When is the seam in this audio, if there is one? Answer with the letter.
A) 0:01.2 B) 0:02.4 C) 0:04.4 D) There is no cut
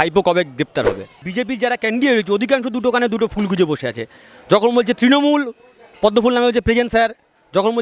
A